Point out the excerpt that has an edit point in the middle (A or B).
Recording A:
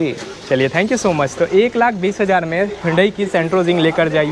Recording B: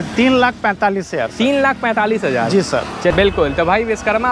B